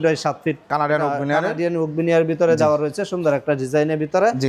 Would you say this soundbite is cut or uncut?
uncut